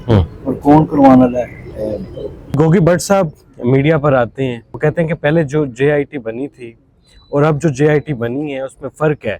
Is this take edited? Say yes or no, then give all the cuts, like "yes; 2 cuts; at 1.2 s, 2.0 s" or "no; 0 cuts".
yes; 2 cuts; at 2.6 s, 4.6 s